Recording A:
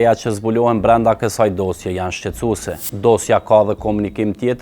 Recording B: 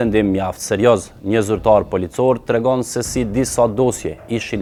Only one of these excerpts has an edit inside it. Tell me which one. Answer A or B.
A